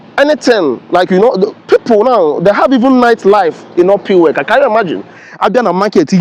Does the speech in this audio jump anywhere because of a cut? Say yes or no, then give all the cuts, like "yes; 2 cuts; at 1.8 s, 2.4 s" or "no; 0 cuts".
yes; 1 cut; at 5.2 s